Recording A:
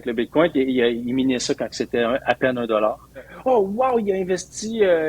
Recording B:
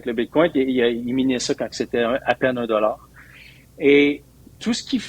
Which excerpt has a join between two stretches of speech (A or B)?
A